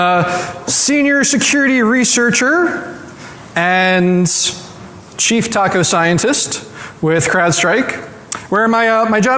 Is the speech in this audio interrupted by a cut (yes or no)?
no